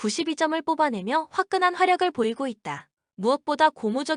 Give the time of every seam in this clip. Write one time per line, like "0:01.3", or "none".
none